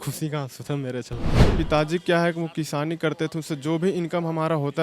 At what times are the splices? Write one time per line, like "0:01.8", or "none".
0:01.5